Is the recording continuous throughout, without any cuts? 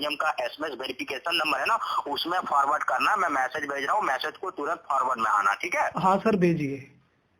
yes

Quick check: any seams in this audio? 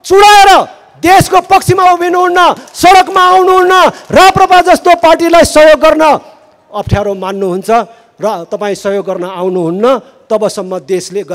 no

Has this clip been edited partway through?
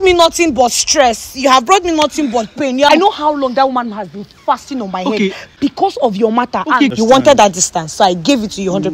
yes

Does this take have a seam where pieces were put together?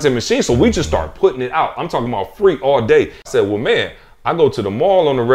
yes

